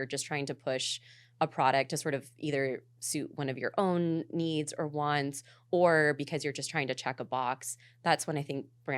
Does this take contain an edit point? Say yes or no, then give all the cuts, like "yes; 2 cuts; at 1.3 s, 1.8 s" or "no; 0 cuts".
no; 0 cuts